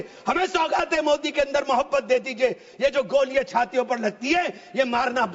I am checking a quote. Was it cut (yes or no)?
no